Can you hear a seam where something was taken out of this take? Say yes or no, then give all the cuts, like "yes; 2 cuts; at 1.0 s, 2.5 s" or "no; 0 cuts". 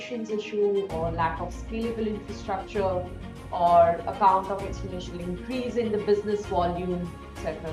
no; 0 cuts